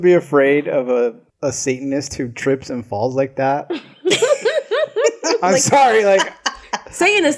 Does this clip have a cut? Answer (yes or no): yes